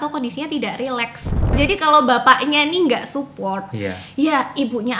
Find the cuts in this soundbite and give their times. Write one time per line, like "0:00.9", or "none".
0:01.5